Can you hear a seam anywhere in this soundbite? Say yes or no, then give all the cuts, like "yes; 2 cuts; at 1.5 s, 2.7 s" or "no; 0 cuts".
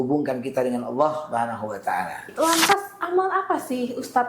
yes; 1 cut; at 2.3 s